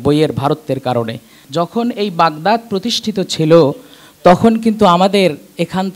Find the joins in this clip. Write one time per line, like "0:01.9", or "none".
0:01.4